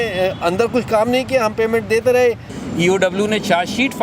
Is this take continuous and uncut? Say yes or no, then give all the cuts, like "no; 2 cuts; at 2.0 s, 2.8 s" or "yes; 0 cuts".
no; 1 cut; at 2.5 s